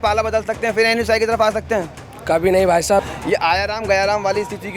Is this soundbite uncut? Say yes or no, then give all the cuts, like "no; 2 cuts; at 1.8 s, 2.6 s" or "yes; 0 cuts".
no; 1 cut; at 3.1 s